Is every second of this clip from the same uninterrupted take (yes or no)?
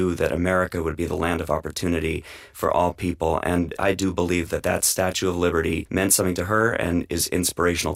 no